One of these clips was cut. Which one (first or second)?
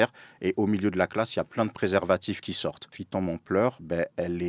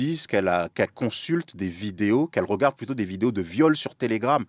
first